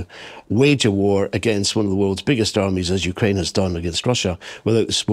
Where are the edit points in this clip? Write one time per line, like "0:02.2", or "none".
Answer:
none